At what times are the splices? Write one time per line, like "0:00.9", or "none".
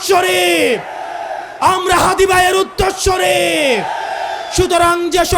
none